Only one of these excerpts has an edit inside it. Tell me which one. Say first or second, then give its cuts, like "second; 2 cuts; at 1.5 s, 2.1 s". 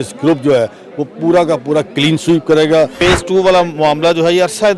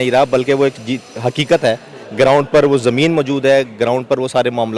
first; 1 cut; at 3.0 s